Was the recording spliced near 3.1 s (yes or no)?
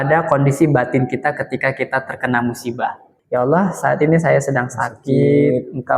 yes